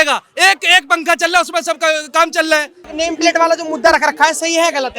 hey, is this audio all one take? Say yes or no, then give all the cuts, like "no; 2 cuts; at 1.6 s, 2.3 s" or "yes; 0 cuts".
yes; 0 cuts